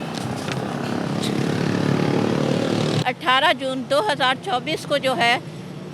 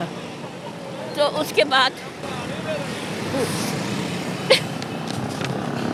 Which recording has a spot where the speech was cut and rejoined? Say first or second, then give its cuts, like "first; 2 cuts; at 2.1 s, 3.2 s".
first; 1 cut; at 3.0 s